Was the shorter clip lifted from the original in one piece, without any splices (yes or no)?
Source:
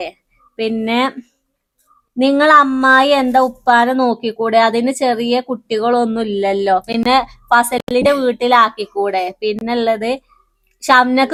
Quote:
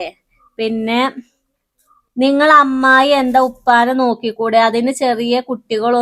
yes